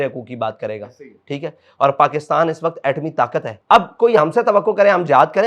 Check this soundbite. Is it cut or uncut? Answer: cut